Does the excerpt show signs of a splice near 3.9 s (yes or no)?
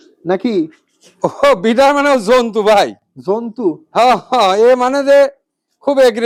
no